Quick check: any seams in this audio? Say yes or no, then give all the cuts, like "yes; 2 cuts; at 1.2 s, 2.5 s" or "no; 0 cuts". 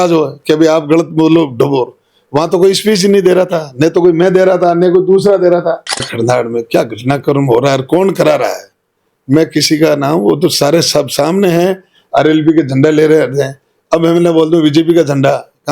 yes; 1 cut; at 6.1 s